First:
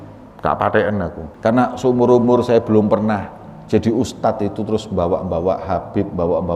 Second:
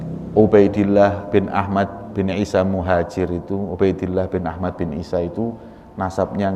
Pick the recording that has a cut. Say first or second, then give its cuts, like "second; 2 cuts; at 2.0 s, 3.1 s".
first; 1 cut; at 1.2 s